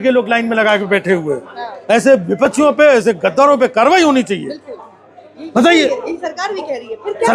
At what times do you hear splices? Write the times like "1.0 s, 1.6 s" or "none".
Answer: none